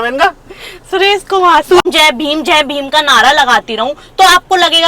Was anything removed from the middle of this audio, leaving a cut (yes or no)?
yes